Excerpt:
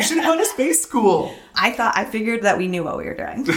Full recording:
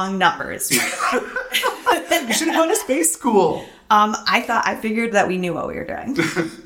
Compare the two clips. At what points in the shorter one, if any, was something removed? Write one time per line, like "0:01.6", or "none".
0:01.5